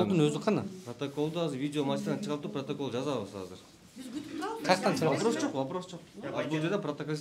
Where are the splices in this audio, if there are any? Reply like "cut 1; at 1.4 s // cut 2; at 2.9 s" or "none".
none